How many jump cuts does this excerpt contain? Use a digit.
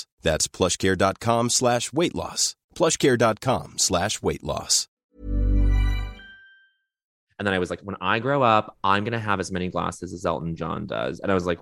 1